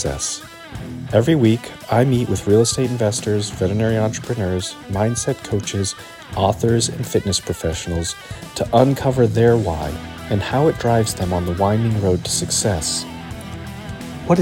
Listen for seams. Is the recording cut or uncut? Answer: uncut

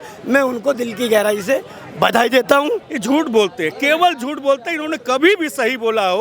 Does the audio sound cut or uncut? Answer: cut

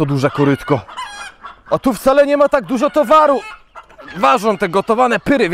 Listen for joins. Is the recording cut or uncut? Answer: uncut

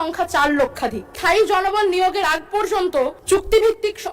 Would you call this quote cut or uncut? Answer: cut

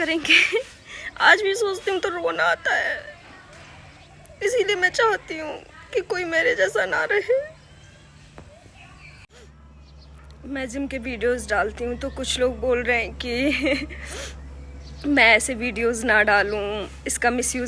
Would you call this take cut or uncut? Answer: uncut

